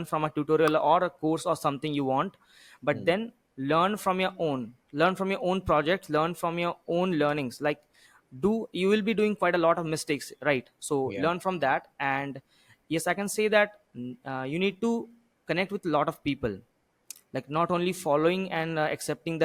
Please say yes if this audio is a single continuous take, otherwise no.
yes